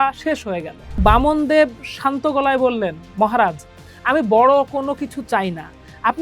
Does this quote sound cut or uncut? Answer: cut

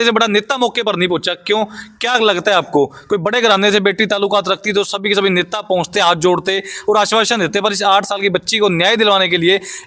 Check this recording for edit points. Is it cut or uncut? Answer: uncut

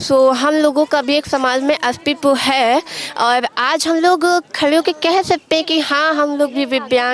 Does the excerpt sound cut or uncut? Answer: uncut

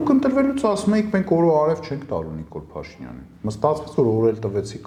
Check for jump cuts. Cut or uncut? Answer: uncut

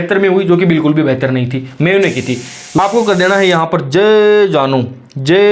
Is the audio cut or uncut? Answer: cut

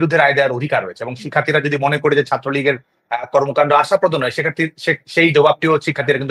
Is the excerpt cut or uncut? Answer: uncut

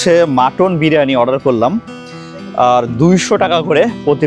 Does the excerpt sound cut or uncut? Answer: uncut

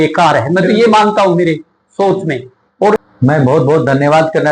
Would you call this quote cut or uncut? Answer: cut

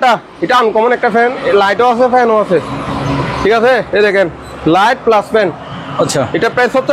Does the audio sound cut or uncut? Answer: uncut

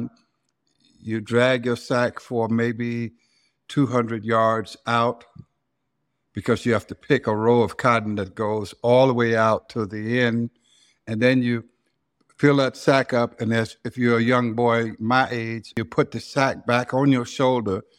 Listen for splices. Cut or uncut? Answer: cut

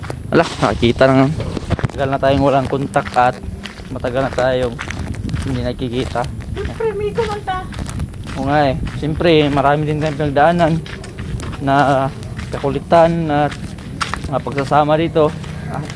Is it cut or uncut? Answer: cut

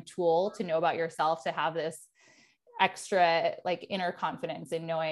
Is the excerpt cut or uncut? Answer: uncut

